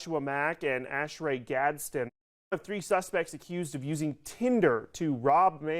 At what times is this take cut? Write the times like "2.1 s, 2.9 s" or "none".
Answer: 2.1 s